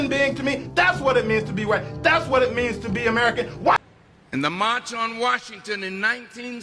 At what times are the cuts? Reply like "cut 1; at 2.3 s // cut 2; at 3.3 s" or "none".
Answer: cut 1; at 3.7 s